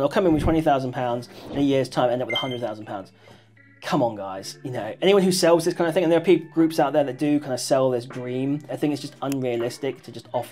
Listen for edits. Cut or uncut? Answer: cut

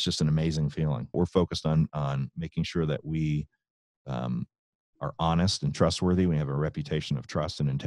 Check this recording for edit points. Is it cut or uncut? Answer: cut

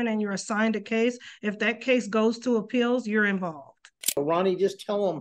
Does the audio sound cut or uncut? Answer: cut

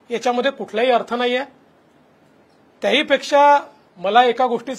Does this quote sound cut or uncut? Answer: uncut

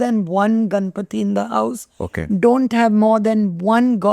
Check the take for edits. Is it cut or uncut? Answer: uncut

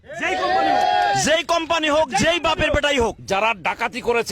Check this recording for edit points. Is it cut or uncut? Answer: cut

